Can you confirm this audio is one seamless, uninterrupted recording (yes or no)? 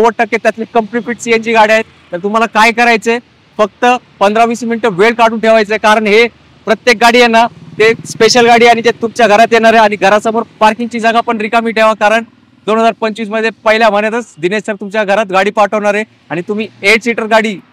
yes